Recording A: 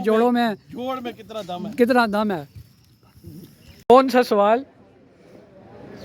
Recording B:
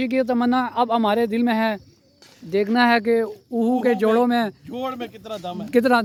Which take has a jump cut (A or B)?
A